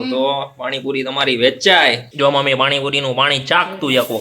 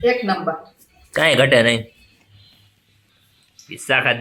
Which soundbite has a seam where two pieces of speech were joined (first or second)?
first